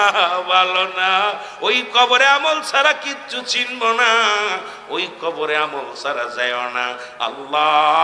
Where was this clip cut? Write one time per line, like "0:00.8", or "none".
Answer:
none